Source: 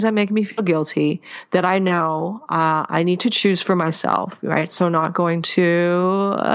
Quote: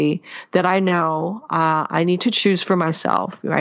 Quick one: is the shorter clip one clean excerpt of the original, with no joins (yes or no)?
yes